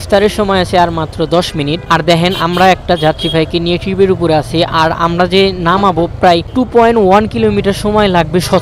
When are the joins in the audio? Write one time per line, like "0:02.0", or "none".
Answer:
none